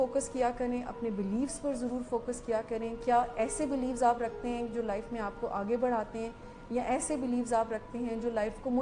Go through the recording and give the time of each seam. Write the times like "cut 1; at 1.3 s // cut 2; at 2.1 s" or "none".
none